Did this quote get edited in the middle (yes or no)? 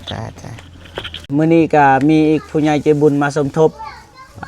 yes